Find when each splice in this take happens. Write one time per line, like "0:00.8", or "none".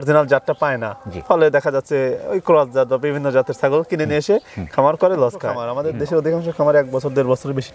0:05.7